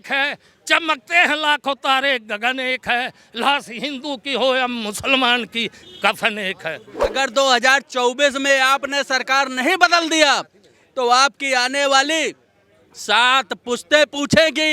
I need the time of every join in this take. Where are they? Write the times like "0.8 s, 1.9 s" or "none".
7.1 s